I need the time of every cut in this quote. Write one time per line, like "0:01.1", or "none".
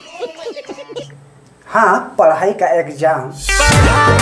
0:01.2
0:03.3